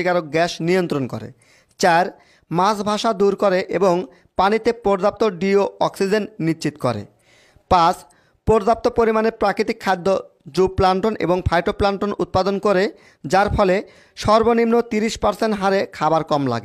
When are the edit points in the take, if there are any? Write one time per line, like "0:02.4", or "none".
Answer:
none